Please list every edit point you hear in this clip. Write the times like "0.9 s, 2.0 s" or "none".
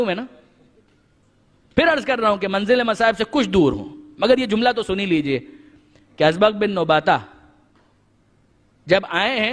5.7 s